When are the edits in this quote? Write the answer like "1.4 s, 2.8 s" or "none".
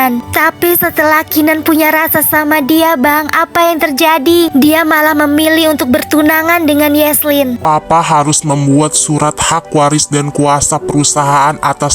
7.6 s